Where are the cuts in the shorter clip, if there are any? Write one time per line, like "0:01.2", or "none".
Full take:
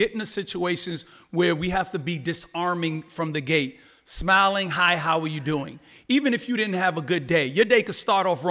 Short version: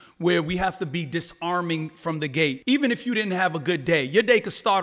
0:02.6